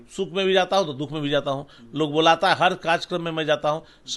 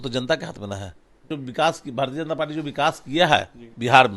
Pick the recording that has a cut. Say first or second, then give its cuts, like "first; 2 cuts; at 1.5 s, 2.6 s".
second; 1 cut; at 1.3 s